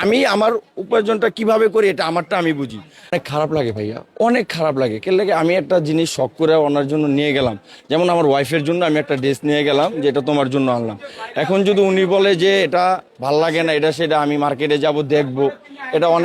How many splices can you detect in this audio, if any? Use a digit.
1